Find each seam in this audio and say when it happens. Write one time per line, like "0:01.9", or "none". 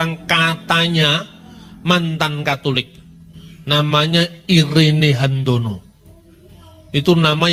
none